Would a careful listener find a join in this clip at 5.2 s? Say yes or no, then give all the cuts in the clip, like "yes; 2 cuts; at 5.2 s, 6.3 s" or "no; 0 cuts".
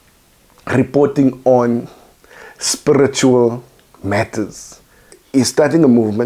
yes; 1 cut; at 5.2 s